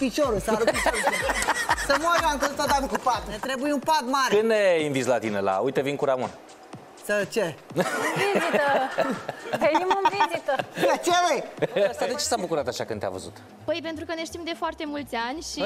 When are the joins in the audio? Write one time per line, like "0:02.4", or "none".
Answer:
0:03.4
0:12.0